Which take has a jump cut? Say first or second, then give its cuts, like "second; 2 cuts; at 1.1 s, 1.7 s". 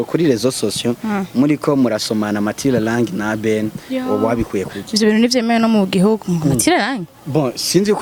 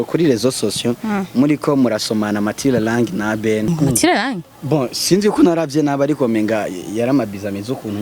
second; 1 cut; at 3.7 s